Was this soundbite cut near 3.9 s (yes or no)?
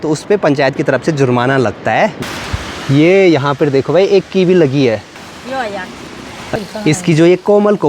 no